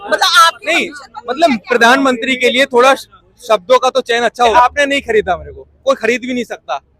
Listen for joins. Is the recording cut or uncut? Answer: cut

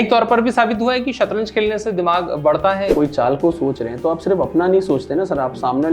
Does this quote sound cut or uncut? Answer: cut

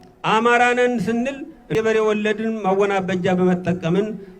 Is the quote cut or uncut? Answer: cut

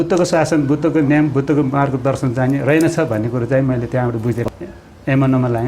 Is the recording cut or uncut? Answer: cut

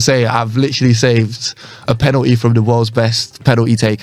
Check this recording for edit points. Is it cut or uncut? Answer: uncut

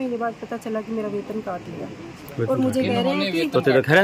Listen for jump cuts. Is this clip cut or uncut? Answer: uncut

